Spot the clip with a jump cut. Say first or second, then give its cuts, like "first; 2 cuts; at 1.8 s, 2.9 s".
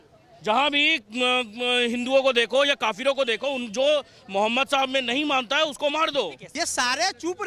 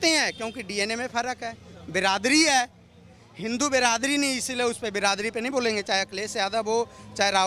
first; 1 cut; at 6.4 s